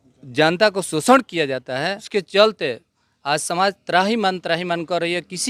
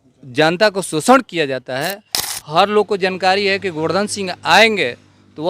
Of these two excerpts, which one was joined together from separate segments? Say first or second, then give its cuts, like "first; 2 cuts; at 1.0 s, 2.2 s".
second; 1 cut; at 2.0 s